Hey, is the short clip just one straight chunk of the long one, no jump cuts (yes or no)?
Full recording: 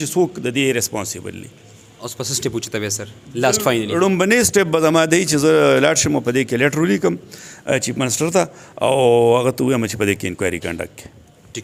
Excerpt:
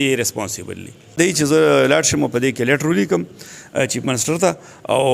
no